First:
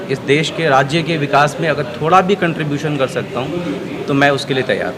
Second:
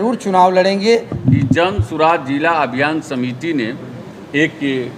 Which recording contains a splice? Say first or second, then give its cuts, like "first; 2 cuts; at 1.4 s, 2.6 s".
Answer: second; 1 cut; at 1.1 s